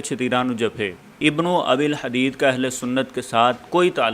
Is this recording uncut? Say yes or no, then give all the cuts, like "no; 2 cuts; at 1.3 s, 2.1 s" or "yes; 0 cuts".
no; 1 cut; at 1.2 s